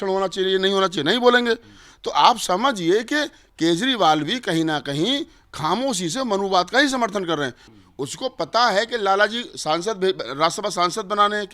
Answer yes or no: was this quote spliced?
yes